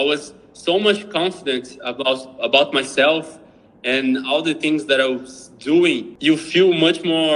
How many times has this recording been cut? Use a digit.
1